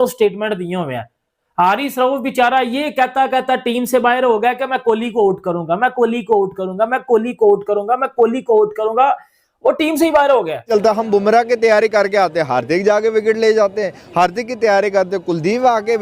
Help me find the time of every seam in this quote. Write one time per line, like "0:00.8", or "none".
0:10.6